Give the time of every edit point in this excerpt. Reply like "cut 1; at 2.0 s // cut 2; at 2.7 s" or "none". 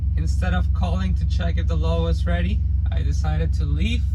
none